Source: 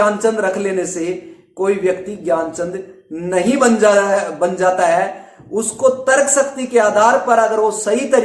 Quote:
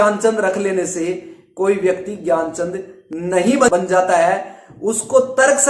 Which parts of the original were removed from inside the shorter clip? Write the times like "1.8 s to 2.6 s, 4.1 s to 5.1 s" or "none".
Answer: 3.7 s to 4.4 s